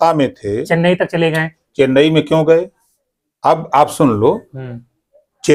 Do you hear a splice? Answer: no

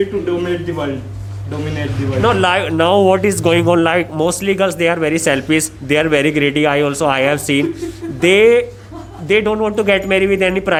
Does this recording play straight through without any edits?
yes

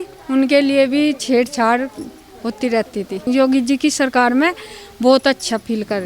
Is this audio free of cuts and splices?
no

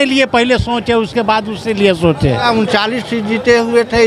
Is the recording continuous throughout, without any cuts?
no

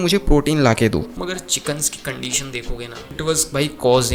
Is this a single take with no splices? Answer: no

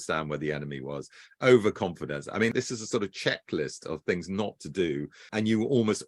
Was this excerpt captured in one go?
no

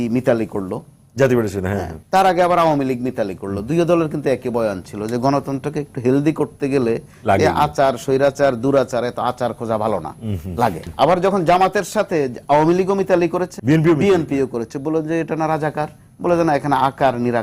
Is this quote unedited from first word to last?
no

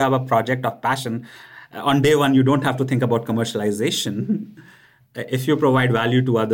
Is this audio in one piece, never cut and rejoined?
yes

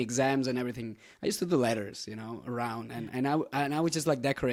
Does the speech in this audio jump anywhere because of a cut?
no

